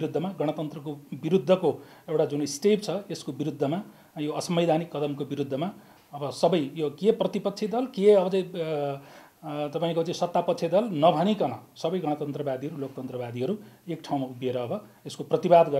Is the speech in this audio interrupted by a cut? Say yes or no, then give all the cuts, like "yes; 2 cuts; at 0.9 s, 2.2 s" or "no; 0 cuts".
no; 0 cuts